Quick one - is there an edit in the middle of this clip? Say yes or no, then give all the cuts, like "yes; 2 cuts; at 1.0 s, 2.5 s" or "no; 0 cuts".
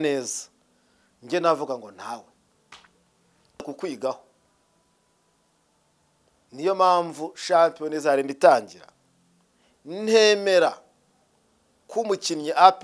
yes; 1 cut; at 3.7 s